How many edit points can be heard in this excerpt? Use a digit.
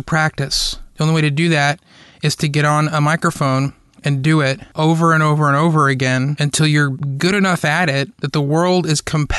2